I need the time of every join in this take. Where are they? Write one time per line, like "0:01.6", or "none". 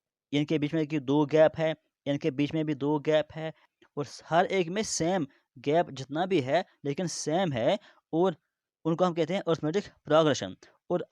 0:03.7

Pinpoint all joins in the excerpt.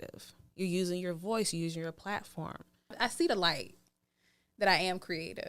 0:02.9

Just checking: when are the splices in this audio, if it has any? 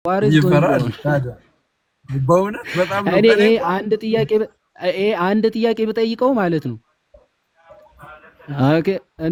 none

